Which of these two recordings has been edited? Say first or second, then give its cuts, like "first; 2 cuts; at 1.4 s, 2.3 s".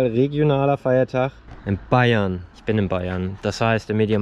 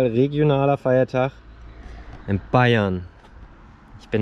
first; 2 cuts; at 1.5 s, 2.5 s